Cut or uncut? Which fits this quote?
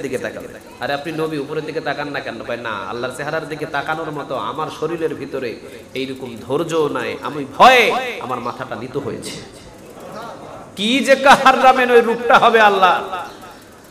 uncut